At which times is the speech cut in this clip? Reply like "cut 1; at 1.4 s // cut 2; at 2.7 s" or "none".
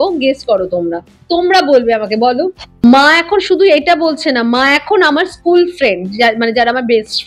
cut 1; at 2.6 s